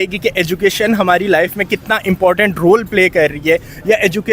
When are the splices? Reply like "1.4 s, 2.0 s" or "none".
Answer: none